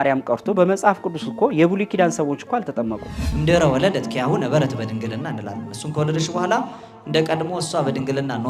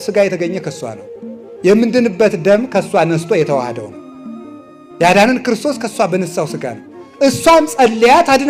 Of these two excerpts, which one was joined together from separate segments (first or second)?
first